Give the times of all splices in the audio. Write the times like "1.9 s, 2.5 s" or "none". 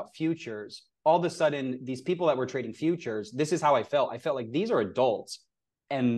none